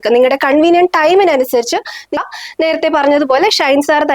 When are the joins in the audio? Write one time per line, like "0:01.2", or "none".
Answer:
0:02.2